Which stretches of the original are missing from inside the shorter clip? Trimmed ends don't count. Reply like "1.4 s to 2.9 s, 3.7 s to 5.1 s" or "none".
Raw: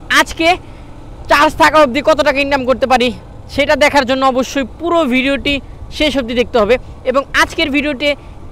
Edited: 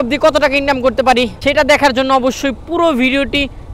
3.2 s to 3.5 s